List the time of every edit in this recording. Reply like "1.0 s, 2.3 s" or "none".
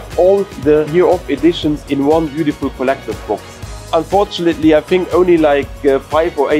none